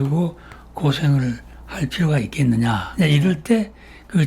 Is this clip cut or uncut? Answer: cut